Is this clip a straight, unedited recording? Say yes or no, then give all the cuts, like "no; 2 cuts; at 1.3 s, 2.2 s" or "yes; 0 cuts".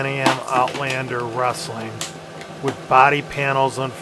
yes; 0 cuts